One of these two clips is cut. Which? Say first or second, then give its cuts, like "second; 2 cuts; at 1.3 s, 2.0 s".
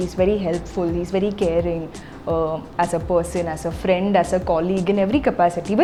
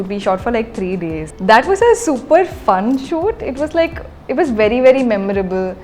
second; 1 cut; at 1.3 s